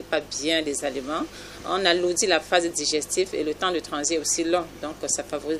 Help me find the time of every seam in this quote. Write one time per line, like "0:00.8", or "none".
none